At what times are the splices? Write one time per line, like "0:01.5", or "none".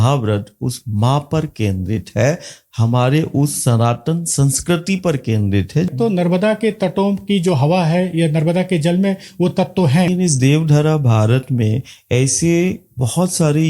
0:05.9
0:10.1